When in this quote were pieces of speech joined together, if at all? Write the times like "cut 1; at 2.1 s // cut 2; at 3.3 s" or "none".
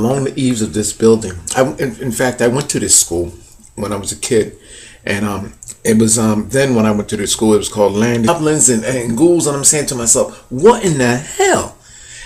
none